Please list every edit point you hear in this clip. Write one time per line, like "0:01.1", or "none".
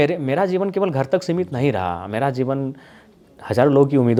none